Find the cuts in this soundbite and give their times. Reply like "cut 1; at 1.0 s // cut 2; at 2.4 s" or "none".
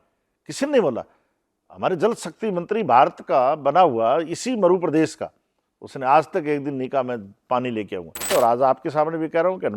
cut 1; at 8.3 s